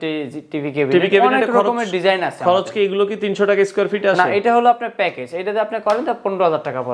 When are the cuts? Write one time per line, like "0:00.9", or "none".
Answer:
none